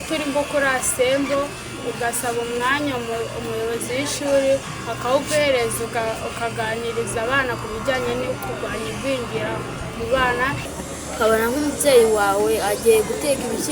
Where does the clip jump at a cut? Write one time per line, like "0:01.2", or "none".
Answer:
0:10.7